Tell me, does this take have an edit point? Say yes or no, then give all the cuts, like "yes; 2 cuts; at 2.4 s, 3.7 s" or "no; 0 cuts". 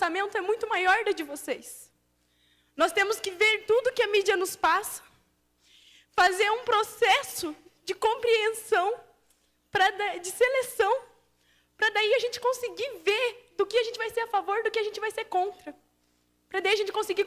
yes; 1 cut; at 8.6 s